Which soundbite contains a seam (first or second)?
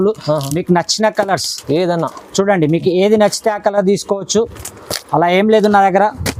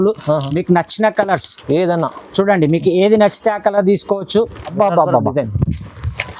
second